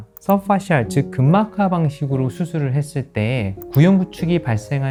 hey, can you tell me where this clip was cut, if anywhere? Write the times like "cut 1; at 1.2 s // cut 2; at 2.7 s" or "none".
none